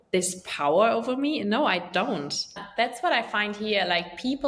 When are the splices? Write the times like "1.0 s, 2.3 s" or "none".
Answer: 2.5 s